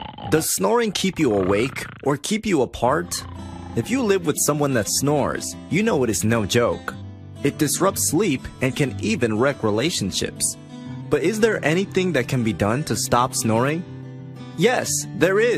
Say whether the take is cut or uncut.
uncut